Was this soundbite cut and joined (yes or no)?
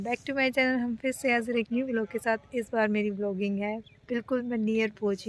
no